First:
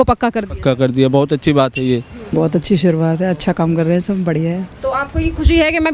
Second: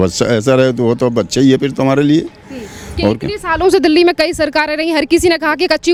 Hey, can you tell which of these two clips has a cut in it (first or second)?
first